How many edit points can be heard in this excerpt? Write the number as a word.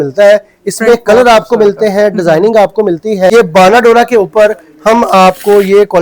one